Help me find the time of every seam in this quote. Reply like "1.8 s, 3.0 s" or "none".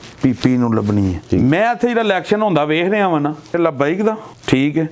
1.2 s, 3.5 s

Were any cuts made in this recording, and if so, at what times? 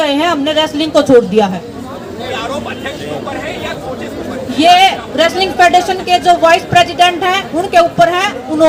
none

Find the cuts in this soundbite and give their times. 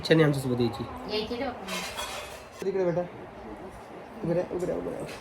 2.6 s

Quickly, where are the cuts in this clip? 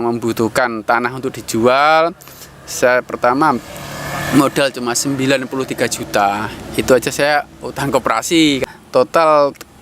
8.6 s

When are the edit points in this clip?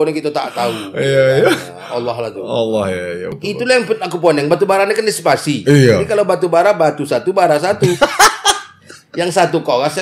3.4 s

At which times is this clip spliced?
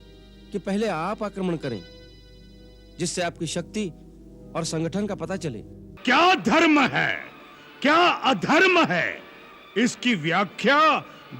5.9 s

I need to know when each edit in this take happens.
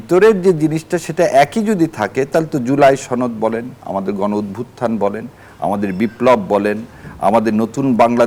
none

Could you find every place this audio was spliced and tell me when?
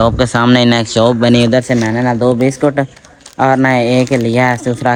none

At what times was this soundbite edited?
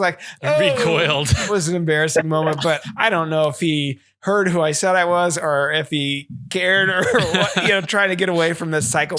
1.5 s, 2.8 s

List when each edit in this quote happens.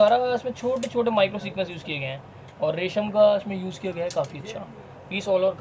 none

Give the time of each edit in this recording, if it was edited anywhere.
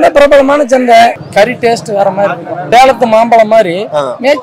1.2 s, 2.5 s

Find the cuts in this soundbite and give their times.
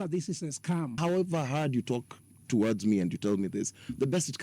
0.9 s

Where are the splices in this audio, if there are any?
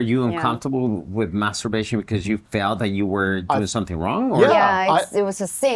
none

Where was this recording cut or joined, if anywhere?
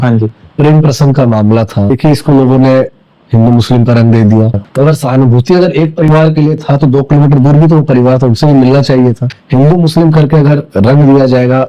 1.9 s, 4.6 s, 9.3 s

